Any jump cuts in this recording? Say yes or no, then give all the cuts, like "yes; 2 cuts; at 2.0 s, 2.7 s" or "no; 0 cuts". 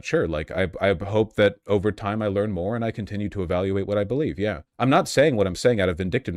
no; 0 cuts